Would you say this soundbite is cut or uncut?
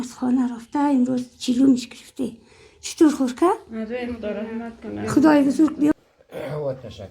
cut